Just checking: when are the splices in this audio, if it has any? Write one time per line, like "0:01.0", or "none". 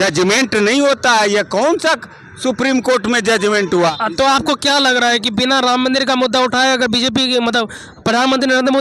0:03.9